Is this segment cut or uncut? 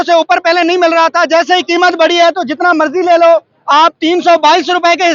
uncut